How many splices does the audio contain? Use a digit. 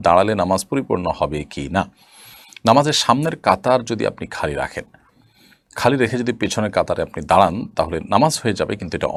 0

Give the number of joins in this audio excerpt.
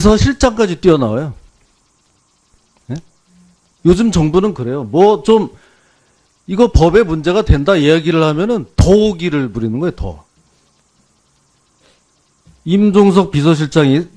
1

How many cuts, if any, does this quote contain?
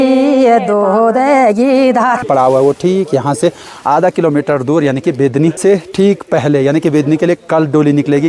2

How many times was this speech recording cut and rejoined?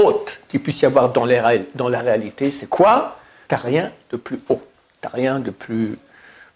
1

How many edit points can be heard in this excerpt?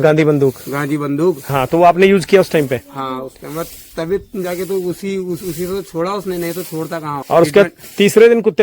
2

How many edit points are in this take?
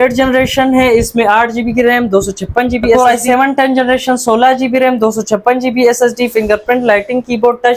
1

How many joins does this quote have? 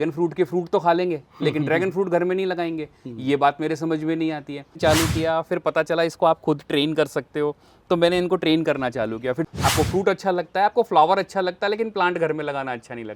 2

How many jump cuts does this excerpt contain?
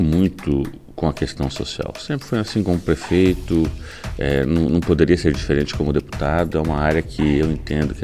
0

